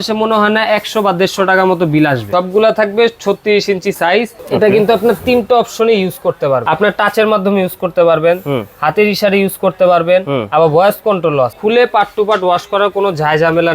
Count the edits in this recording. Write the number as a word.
four